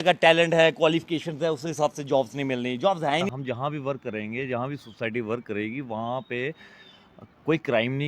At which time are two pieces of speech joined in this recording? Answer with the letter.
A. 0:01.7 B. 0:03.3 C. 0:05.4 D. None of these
B